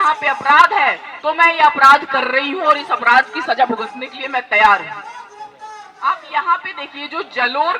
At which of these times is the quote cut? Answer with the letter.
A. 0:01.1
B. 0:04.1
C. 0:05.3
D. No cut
D